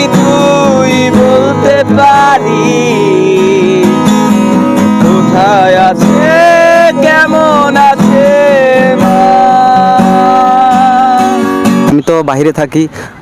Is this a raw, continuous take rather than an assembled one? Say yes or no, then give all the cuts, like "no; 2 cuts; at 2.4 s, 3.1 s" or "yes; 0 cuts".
no; 1 cut; at 11.9 s